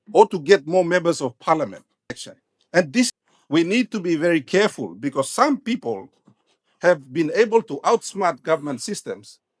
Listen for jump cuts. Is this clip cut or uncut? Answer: cut